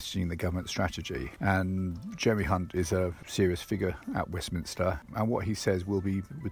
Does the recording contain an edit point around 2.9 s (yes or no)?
no